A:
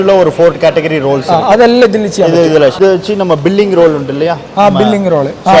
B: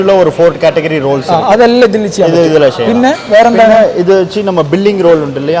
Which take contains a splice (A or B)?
A